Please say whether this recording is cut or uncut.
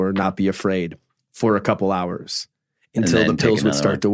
uncut